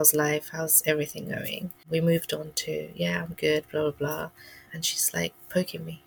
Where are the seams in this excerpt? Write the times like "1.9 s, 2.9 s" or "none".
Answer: 1.8 s, 4.6 s